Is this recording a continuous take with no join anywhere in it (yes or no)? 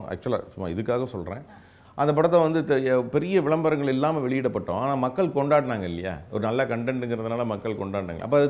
yes